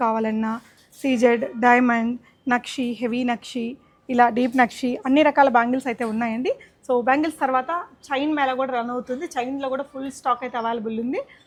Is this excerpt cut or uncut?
uncut